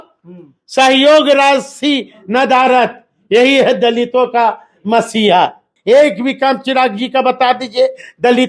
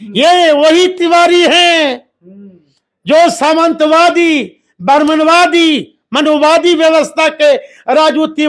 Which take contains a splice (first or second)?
first